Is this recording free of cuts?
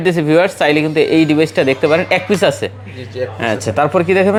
yes; 0 cuts

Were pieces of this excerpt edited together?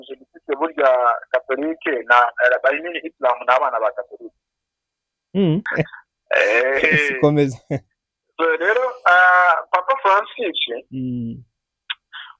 yes; 1 cut; at 5.7 s

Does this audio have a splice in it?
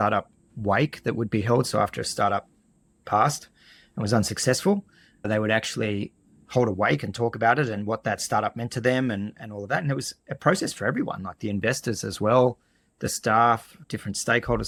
no; 0 cuts

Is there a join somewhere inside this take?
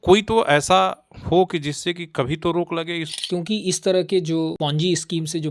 yes; 2 cuts; at 3.1 s, 4.5 s

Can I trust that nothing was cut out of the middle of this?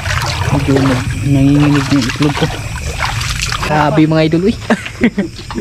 no; 1 cut; at 3.7 s

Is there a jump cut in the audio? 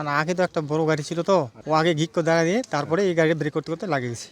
yes; 1 cut; at 1.6 s

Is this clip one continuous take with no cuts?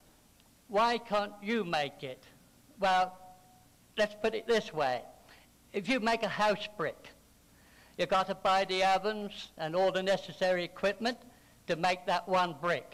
yes; 0 cuts

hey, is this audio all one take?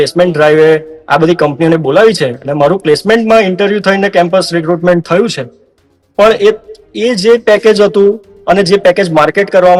yes; 0 cuts

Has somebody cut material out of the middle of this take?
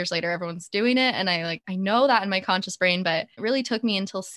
yes; 2 cuts; at 1.6 s, 3.4 s

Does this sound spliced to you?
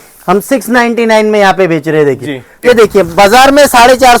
yes; 1 cut; at 2.6 s

